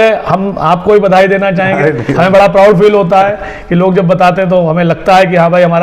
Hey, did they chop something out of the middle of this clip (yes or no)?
no